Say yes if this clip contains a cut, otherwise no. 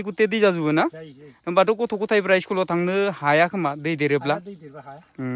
no